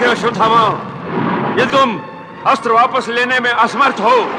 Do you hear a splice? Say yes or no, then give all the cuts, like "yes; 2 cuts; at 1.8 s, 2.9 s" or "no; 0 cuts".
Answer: yes; 1 cut; at 1.7 s